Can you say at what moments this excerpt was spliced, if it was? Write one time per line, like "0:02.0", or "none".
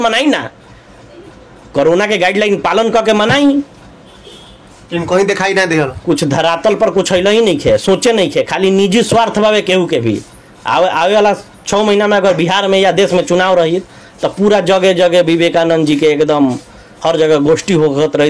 none